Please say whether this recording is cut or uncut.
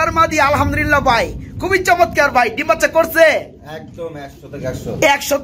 uncut